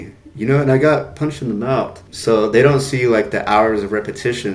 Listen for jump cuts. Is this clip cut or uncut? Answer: cut